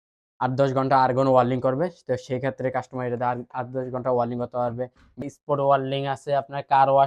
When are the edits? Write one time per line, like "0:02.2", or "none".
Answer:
0:05.1

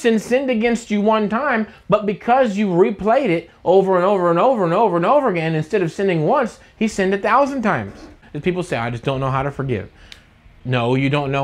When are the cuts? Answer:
0:08.2
0:10.5

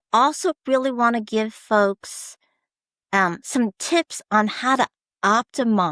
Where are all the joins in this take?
none

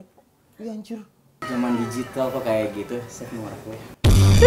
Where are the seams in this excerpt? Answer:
0:01.4

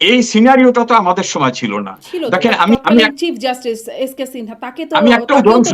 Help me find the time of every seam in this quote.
0:02.7

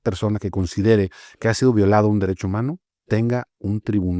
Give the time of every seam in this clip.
none

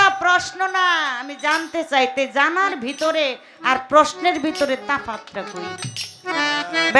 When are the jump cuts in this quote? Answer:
none

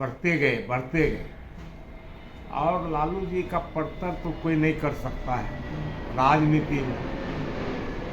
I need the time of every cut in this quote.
none

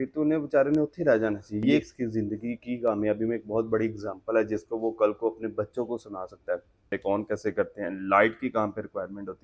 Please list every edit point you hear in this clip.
0:01.9
0:06.9

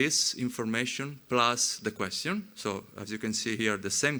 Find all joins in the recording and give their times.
none

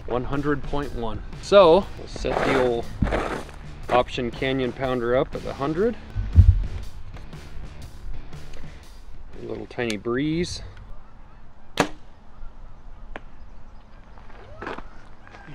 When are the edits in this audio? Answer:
0:13.8

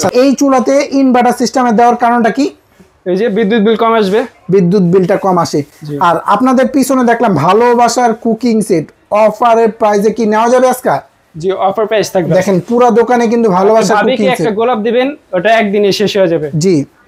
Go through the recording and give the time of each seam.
none

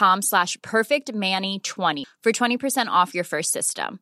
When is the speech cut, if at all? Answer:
0:02.0

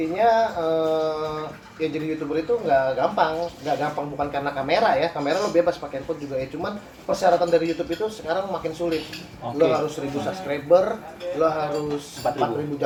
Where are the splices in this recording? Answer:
none

